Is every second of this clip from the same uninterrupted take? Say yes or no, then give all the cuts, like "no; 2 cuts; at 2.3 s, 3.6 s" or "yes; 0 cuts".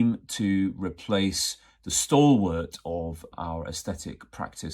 no; 1 cut; at 3.3 s